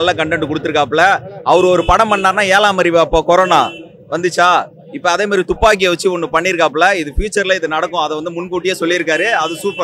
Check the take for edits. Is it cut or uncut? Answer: uncut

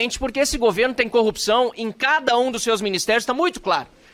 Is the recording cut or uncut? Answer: uncut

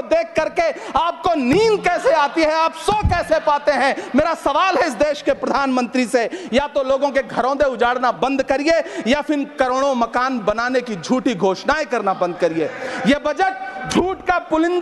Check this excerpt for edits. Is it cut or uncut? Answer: uncut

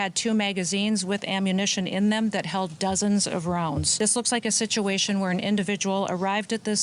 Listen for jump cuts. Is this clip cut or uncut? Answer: cut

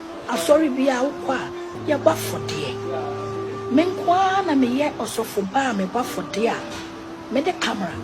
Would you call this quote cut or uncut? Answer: cut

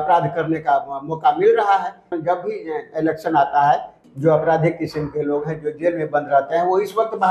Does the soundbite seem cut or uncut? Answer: cut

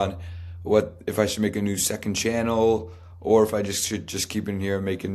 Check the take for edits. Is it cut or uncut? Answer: uncut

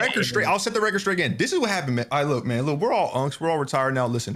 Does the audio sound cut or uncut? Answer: uncut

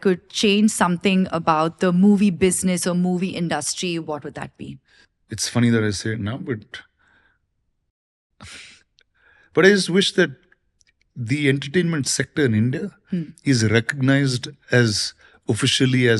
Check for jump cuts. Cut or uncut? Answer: uncut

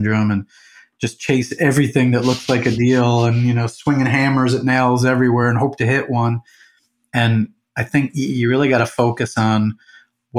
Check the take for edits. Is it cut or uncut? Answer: uncut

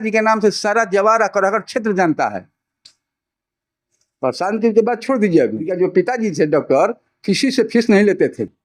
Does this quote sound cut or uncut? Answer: cut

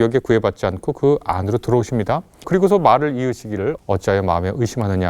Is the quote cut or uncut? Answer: cut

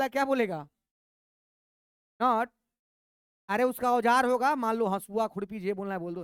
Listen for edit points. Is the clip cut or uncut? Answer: uncut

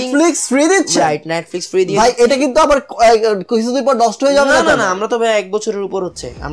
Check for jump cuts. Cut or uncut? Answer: uncut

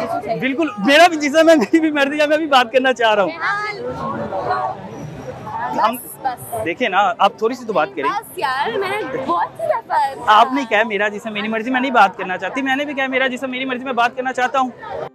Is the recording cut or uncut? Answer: uncut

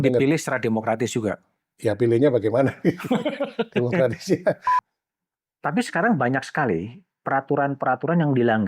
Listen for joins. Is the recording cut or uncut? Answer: cut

